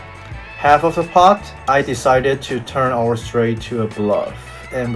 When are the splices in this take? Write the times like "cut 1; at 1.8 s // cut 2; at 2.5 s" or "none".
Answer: cut 1; at 1.5 s